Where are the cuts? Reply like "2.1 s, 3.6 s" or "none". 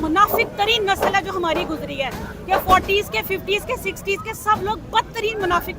none

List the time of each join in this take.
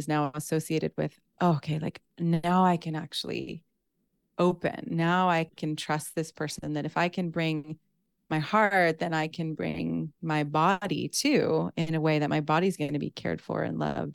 none

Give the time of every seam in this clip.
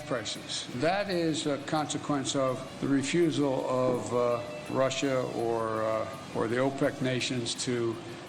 0.7 s, 2.7 s, 4.7 s, 6.2 s

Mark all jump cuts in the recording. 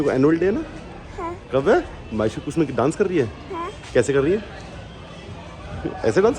none

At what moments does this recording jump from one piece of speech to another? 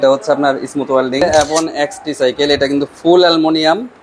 1.2 s

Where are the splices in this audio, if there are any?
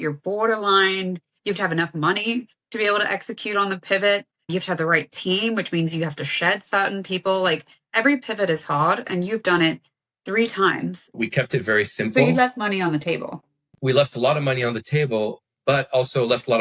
11.1 s

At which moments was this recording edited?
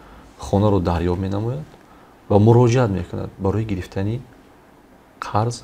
none

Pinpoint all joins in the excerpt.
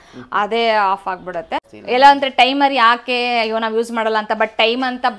1.6 s

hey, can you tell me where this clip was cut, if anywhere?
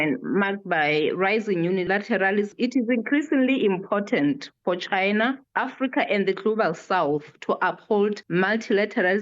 2.5 s, 8.2 s

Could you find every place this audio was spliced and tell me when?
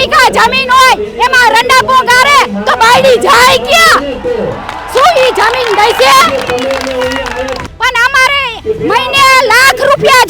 7.6 s

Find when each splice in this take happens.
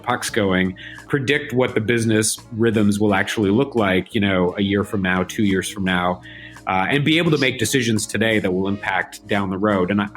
1.0 s

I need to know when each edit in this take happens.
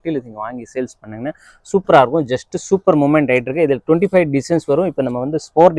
none

